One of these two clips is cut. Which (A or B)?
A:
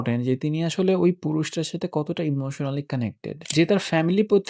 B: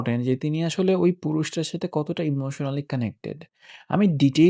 A